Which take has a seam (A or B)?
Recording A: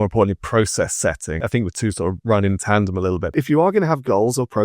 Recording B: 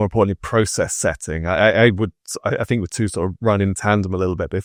A